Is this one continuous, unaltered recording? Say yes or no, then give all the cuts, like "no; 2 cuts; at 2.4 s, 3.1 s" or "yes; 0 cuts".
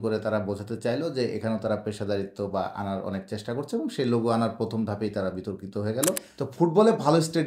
no; 1 cut; at 6.3 s